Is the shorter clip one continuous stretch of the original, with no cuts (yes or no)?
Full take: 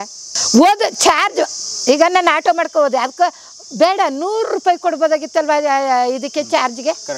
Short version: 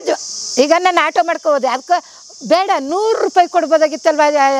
yes